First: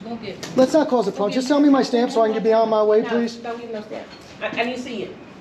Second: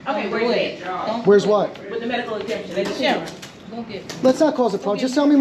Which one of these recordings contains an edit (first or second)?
first